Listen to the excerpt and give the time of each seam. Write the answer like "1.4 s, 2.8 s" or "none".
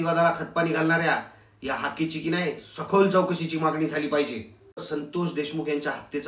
4.8 s